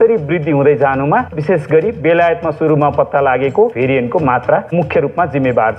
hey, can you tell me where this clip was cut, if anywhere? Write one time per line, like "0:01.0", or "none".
0:01.4
0:03.7

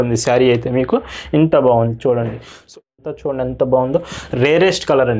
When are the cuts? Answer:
0:02.9

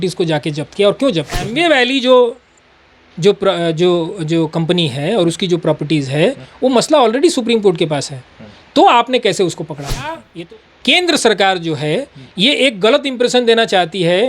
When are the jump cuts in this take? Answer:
0:01.4
0:10.2

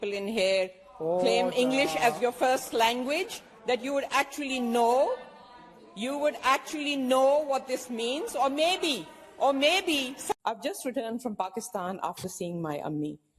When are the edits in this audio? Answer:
0:10.4

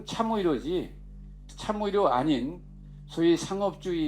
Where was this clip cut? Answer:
0:01.5

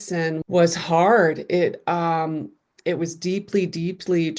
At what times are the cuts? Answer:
none

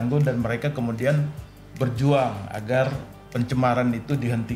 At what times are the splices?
none

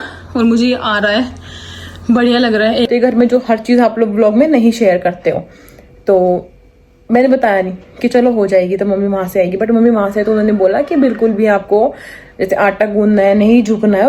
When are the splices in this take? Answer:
0:02.9

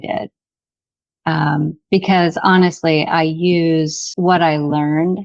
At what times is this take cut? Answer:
0:04.1

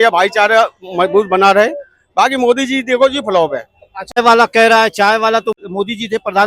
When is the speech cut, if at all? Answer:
0:04.2
0:05.6

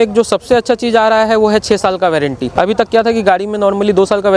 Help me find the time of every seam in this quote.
0:02.4

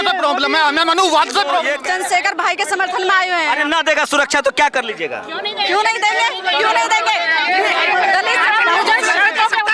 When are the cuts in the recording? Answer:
0:01.8

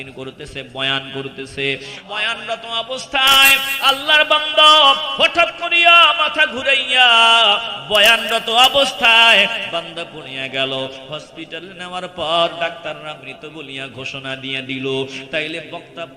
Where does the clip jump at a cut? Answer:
0:02.0

